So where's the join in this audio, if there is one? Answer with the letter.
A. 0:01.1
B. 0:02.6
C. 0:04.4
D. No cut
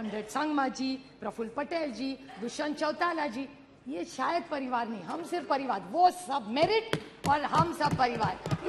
D